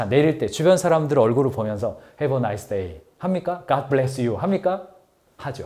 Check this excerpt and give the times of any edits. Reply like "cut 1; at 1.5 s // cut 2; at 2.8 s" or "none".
none